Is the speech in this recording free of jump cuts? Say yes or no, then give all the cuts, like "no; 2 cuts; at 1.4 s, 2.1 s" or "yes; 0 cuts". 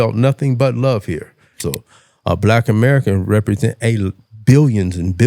no; 1 cut; at 1.6 s